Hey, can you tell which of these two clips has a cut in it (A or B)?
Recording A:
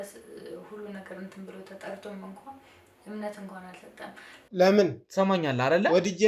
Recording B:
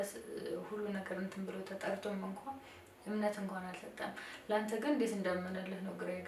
A